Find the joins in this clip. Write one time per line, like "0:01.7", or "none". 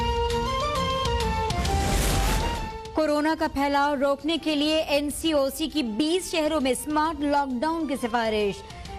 0:01.5